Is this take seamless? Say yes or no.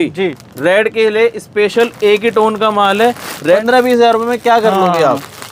no